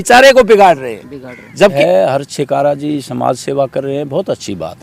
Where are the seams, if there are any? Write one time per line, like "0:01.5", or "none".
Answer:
0:01.7

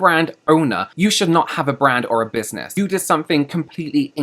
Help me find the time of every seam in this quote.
0:00.9
0:02.6

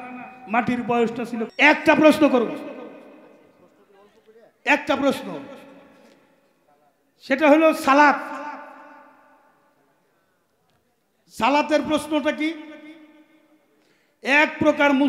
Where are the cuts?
0:01.5

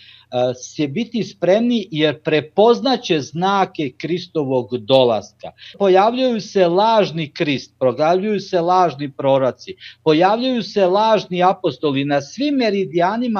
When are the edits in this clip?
0:05.7

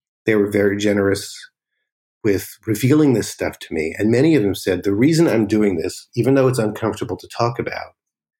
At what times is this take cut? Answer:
0:02.0

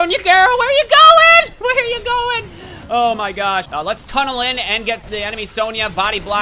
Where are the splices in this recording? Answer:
0:03.7

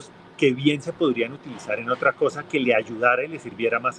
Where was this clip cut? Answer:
none

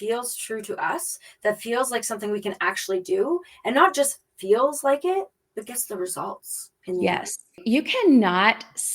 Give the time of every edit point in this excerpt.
0:05.4
0:07.6

